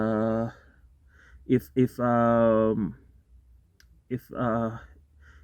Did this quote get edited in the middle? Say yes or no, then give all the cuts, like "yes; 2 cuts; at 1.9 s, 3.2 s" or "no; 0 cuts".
no; 0 cuts